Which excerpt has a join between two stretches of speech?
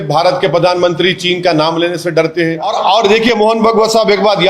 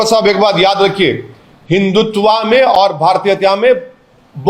first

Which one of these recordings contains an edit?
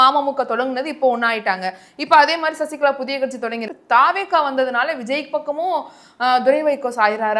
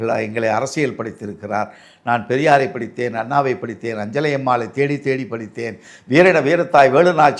first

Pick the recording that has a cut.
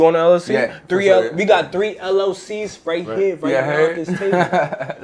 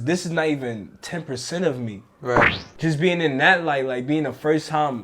second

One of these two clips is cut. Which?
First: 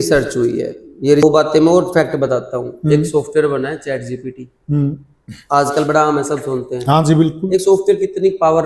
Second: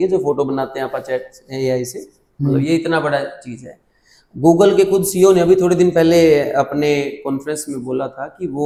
first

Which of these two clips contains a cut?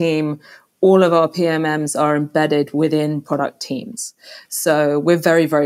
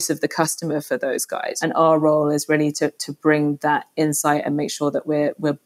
second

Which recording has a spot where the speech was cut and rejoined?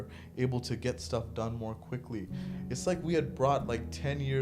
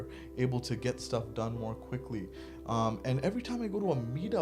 first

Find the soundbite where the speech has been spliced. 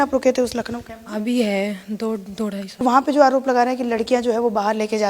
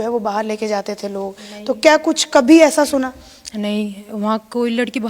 first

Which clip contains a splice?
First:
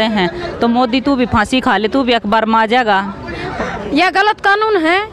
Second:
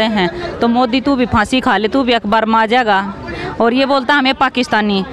first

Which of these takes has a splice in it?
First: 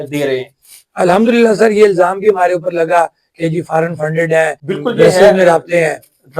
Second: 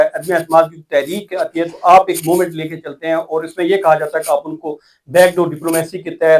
first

